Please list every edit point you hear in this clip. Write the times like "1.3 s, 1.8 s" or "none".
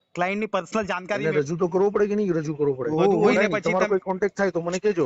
1.2 s, 3.3 s